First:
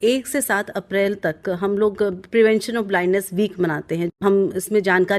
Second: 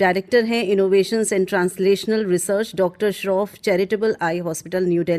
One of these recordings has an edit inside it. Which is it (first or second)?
first